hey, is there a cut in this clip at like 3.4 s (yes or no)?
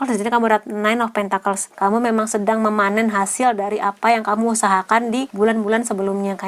no